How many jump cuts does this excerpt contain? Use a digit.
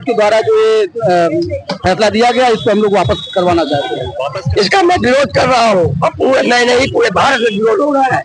1